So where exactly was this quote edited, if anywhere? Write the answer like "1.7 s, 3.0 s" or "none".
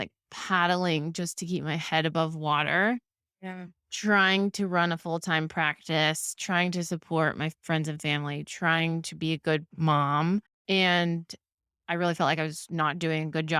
10.5 s